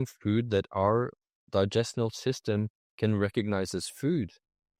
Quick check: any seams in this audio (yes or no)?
no